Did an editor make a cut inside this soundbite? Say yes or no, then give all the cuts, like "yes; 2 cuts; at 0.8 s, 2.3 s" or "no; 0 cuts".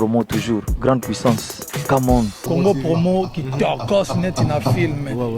yes; 1 cut; at 2.4 s